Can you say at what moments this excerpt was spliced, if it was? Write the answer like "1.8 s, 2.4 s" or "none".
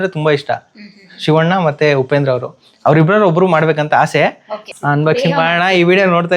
4.7 s